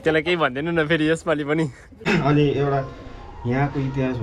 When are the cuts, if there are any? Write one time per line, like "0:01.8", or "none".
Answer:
0:01.9